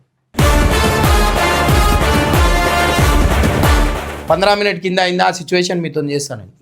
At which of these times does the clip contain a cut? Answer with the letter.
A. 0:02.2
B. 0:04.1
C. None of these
B